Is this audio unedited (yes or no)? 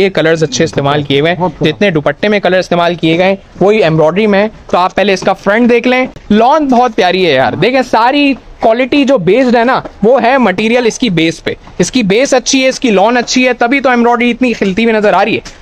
yes